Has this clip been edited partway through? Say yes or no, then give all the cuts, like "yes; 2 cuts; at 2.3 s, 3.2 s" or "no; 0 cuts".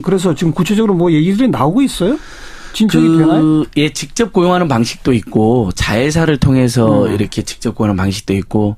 no; 0 cuts